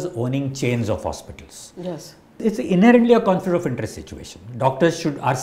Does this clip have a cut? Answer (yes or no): yes